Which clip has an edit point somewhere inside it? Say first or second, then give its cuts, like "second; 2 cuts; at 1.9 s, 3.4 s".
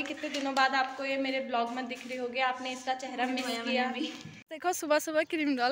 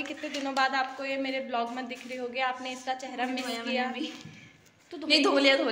first; 1 cut; at 4.5 s